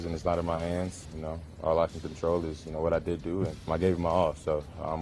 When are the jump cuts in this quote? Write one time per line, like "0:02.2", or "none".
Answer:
0:01.1
0:03.6